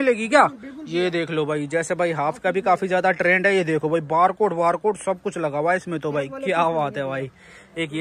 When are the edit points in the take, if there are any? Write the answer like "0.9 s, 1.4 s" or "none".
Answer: none